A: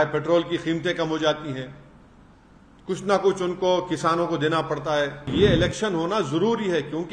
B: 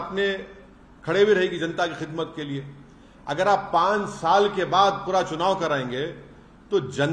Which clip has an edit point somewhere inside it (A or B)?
A